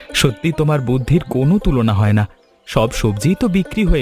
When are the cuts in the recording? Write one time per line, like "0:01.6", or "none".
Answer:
none